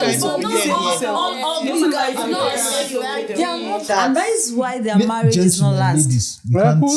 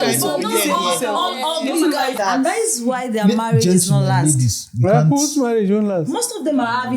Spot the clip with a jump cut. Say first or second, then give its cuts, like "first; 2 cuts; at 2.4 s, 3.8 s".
second; 1 cut; at 2.1 s